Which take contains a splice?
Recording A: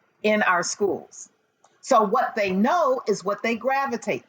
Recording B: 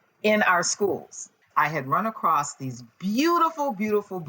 B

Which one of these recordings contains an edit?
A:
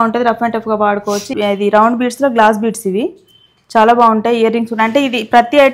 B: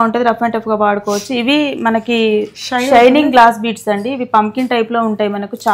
A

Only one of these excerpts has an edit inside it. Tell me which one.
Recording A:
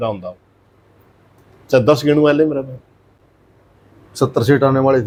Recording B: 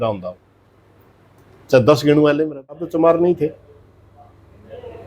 B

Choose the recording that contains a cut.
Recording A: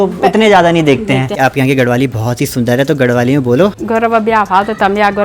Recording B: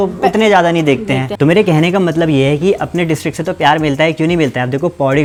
A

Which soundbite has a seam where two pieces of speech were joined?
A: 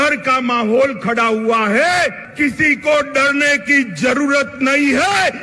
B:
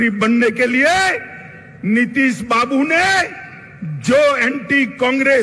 A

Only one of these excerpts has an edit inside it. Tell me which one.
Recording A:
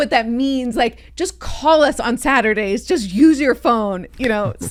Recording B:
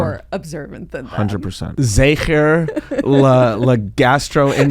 B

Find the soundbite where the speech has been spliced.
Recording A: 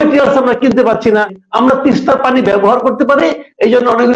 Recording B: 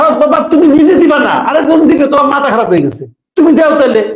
A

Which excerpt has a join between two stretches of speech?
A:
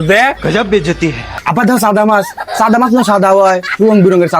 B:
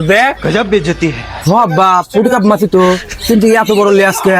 A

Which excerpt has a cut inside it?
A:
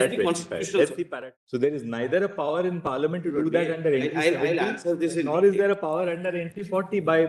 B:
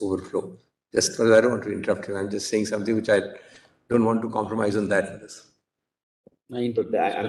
A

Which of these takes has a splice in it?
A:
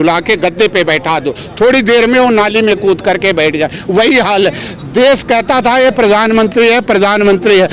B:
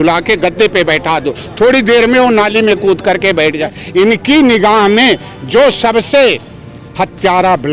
B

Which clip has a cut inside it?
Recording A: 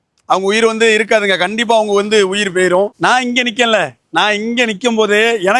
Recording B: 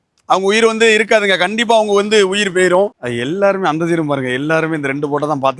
B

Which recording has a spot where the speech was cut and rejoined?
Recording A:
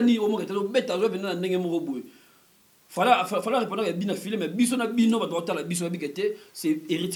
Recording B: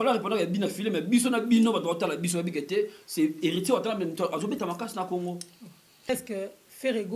B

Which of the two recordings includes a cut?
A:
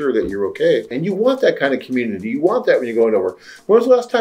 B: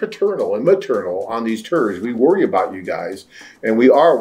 A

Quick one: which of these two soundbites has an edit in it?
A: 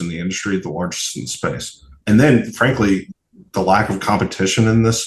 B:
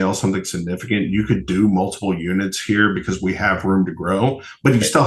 A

